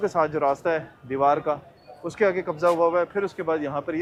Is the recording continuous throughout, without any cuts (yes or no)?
yes